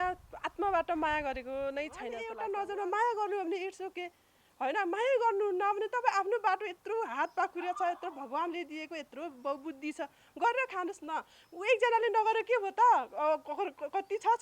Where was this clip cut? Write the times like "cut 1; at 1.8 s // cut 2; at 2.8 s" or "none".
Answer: cut 1; at 2.3 s